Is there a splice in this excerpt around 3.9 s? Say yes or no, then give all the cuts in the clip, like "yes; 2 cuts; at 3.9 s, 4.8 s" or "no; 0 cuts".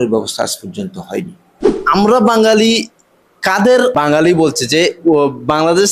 yes; 2 cuts; at 1.8 s, 3.9 s